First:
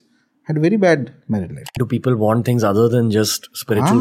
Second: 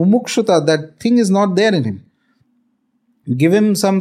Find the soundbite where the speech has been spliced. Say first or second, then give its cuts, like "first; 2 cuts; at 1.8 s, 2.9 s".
first; 1 cut; at 1.8 s